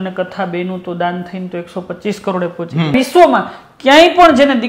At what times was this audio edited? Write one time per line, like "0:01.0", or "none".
0:02.9

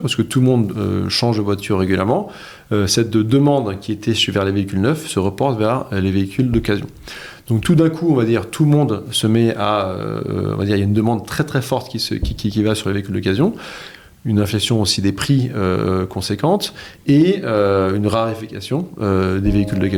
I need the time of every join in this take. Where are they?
none

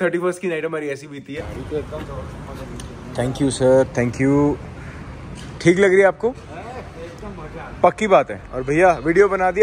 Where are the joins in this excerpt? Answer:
0:01.4
0:08.4

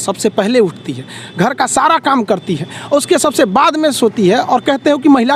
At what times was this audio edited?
none

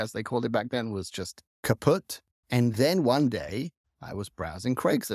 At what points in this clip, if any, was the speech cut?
0:02.2

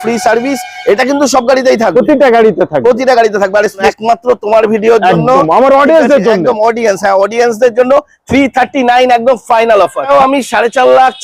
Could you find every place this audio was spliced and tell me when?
0:03.8
0:10.1

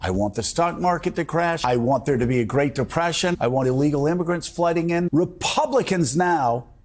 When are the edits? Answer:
0:01.6
0:03.3
0:05.1

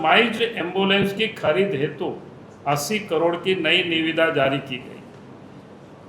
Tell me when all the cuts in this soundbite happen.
none

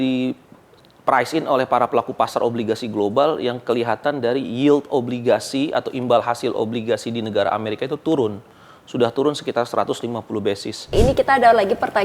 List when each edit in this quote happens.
0:10.9

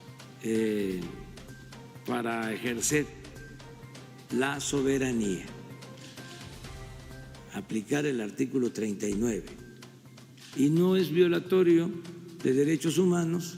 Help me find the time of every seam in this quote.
0:06.1
0:07.5

